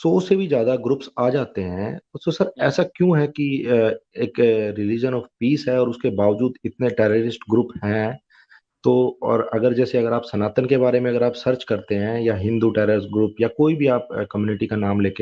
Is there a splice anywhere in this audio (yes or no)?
no